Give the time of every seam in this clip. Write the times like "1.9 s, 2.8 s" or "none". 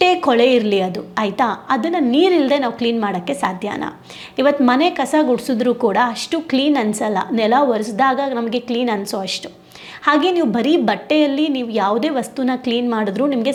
none